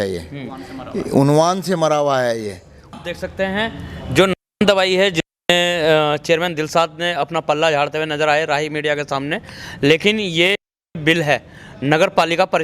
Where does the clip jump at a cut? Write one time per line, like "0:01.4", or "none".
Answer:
0:03.0